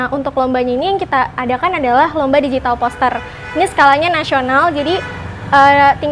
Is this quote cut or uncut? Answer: uncut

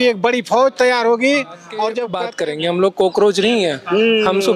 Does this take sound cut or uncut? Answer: cut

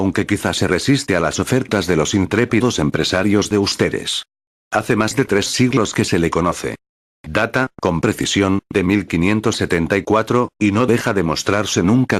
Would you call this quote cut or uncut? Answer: cut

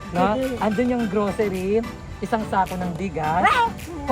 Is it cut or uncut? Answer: uncut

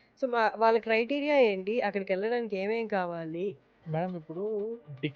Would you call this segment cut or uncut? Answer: cut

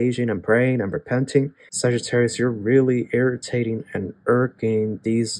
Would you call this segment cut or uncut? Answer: cut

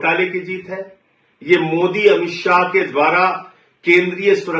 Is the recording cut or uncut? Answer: uncut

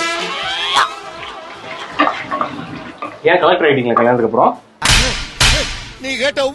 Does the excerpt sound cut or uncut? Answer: uncut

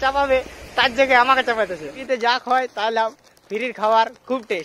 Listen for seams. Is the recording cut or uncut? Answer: cut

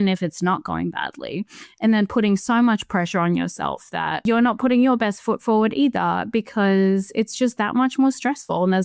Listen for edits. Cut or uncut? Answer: cut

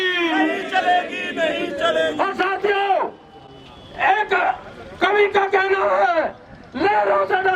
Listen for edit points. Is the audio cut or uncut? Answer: uncut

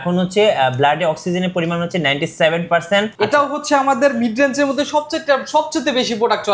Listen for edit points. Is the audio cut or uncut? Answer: cut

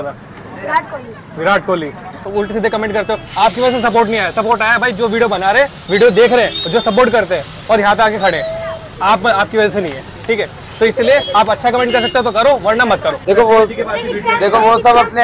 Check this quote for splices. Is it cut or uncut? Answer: cut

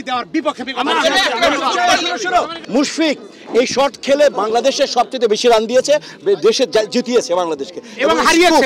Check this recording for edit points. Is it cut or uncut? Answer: cut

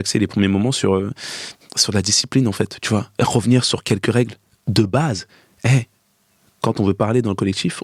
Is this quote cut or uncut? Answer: uncut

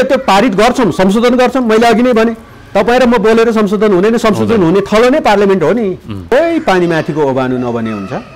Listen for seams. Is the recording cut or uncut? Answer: cut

